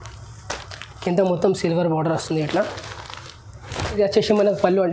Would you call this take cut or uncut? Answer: cut